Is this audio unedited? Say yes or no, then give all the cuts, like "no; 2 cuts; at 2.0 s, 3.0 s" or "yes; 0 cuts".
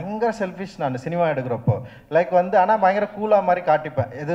yes; 0 cuts